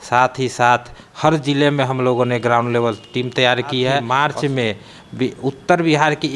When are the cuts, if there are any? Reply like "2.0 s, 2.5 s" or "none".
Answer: 4.0 s